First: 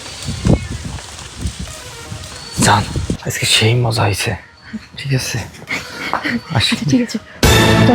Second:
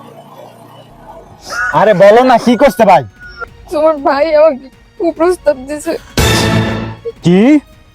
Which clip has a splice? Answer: second; 1 cut; at 1.4 s

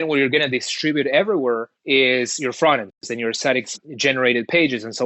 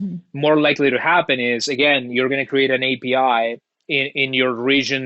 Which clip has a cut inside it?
first; 2 cuts; at 1.7 s, 3.1 s

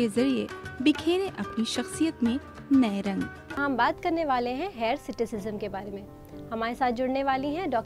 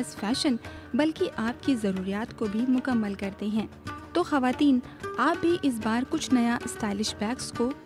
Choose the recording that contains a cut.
first; 1 cut; at 3.6 s

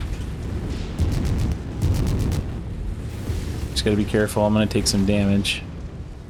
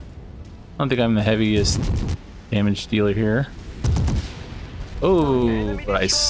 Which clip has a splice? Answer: second; 1 cut; at 4.9 s

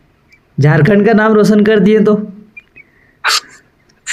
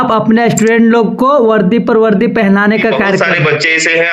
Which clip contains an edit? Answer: second; 1 cut; at 3.2 s

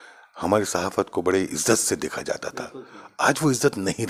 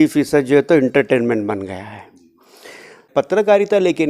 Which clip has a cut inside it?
second; 1 cut; at 3.1 s

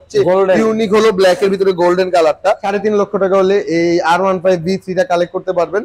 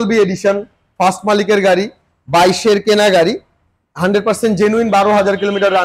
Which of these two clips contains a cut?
first; 1 cut; at 2.7 s

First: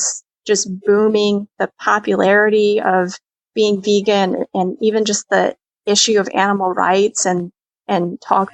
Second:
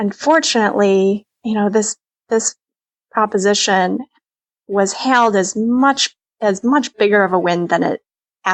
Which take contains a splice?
second; 1 cut; at 1.3 s

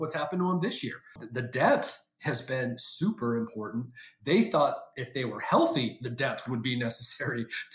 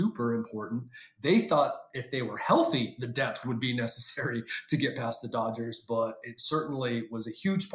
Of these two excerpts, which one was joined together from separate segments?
first; 1 cut; at 1.2 s

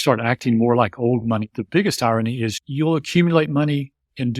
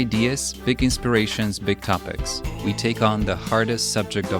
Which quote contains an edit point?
first; 2 cuts; at 1.6 s, 2.6 s

